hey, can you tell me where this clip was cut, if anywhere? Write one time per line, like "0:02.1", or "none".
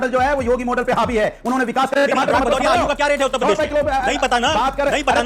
0:02.0